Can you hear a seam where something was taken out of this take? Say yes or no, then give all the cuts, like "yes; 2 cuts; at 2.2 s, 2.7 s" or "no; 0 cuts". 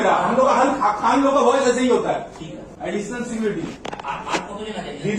yes; 1 cut; at 2.6 s